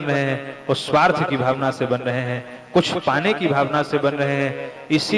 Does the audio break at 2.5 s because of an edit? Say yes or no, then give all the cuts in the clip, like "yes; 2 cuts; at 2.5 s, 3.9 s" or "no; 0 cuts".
no; 0 cuts